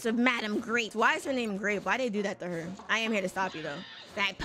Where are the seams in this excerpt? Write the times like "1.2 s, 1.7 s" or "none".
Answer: 0.9 s, 2.8 s